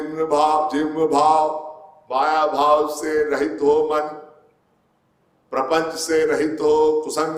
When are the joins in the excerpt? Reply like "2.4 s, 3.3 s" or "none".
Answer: none